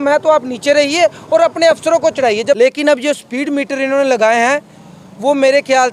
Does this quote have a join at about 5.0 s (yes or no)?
no